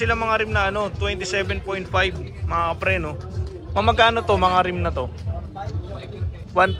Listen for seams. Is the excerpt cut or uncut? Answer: uncut